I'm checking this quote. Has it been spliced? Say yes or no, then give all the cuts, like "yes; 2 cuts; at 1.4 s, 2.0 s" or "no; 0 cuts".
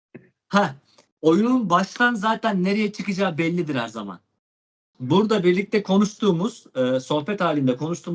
yes; 1 cut; at 4.8 s